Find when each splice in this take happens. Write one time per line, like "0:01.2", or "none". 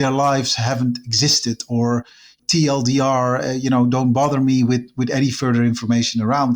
0:02.3